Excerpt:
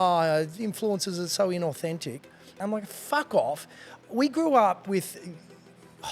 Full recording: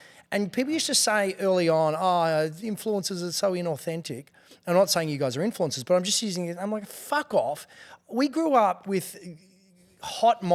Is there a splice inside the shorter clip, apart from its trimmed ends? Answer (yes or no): yes